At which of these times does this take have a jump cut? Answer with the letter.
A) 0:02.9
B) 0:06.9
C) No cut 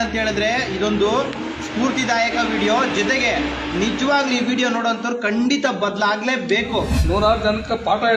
B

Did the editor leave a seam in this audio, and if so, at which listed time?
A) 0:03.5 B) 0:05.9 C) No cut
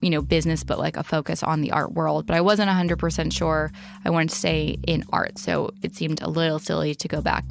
C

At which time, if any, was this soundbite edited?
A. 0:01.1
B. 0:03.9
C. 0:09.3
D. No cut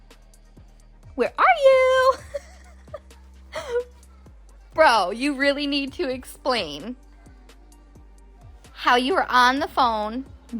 A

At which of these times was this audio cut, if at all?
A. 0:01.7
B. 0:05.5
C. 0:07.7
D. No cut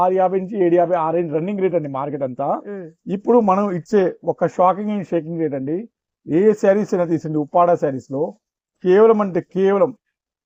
D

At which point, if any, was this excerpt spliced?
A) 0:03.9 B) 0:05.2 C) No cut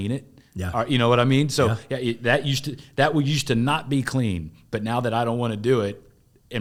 C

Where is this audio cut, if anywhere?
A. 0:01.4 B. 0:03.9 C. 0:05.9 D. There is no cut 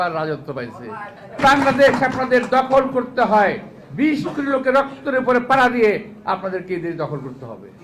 A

